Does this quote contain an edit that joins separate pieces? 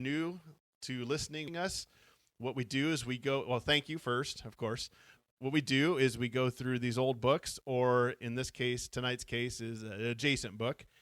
yes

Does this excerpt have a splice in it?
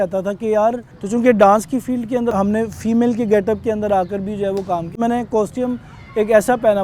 yes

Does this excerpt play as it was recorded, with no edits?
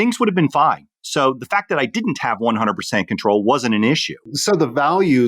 yes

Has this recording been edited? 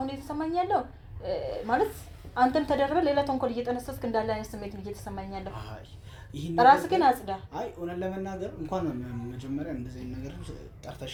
no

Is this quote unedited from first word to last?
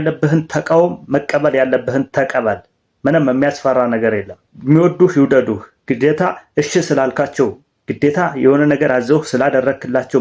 yes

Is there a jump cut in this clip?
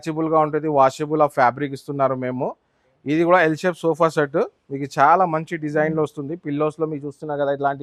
no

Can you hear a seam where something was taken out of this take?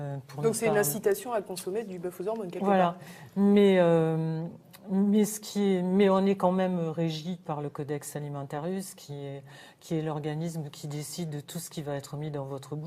no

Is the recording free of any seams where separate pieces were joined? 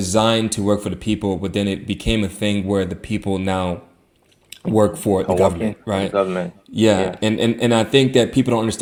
yes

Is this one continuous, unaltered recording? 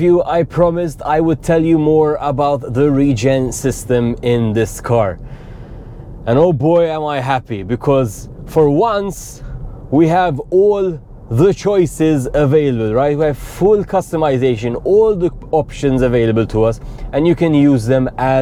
yes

